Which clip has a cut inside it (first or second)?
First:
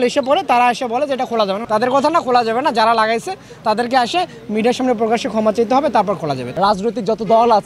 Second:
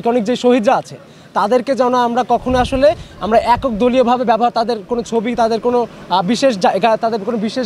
first